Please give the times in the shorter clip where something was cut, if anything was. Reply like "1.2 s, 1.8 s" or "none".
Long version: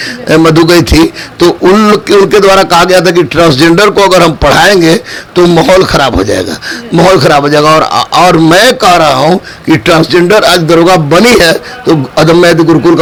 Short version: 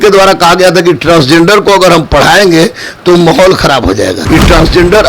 4.2 s